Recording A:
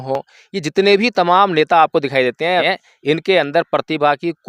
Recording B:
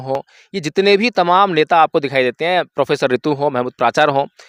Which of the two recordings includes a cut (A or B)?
A